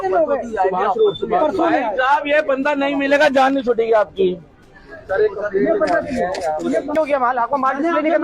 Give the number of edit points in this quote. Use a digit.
1